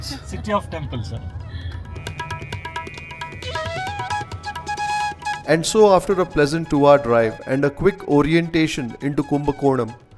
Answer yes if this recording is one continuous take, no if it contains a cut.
yes